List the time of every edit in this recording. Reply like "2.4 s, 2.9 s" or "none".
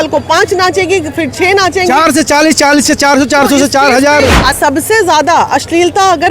4.5 s